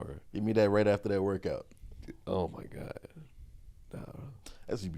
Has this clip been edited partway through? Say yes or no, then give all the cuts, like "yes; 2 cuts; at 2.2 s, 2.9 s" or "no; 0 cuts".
no; 0 cuts